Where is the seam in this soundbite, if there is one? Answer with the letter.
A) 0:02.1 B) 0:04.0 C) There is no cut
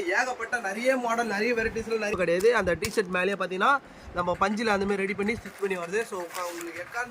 A